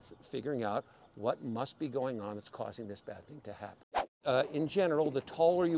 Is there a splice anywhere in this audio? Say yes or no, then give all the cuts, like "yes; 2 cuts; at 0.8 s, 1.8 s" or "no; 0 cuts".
yes; 1 cut; at 4.2 s